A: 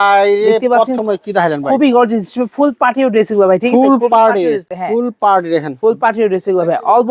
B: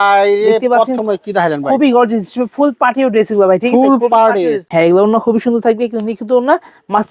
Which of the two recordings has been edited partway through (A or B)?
B